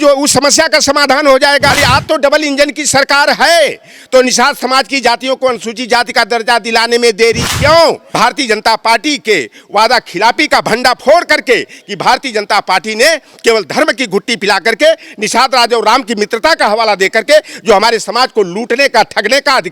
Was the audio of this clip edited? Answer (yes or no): yes